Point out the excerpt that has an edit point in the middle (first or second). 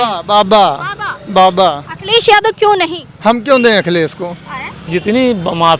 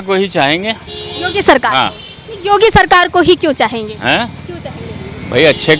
first